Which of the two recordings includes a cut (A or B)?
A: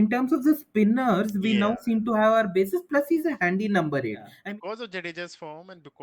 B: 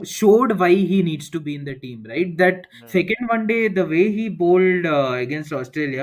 A